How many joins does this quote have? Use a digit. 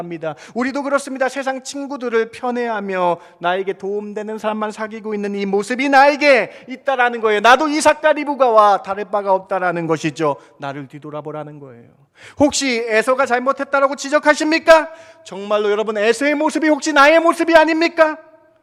0